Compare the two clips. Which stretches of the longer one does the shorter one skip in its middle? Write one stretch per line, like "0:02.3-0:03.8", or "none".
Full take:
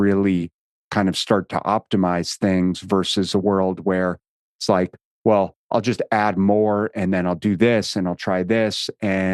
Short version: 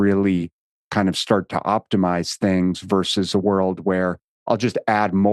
0:04.3-0:05.6